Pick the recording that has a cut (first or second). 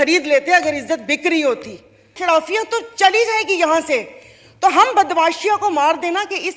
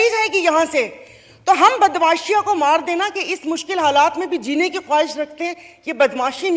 first